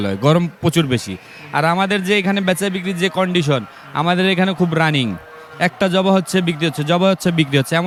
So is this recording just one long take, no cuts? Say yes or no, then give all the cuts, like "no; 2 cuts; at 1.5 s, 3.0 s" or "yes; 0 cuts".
yes; 0 cuts